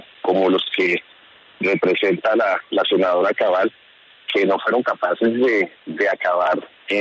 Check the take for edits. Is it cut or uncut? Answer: uncut